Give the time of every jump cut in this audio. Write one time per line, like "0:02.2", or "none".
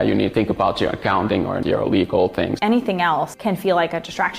0:01.6
0:02.6